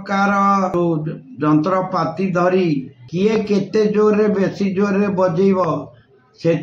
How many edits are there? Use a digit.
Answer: 2